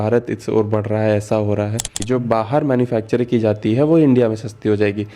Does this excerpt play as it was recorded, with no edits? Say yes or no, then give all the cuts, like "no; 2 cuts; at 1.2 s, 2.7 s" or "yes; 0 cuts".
no; 1 cut; at 2.0 s